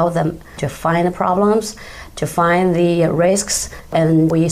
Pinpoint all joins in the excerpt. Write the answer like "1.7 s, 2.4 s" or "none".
none